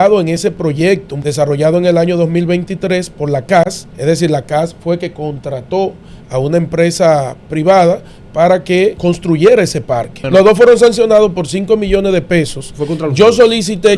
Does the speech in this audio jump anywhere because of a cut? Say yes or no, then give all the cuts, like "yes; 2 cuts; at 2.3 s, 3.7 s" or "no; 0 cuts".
yes; 4 cuts; at 1.1 s, 3.9 s, 9.0 s, 10.2 s